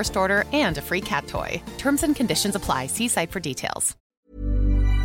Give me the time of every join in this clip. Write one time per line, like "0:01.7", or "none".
0:04.1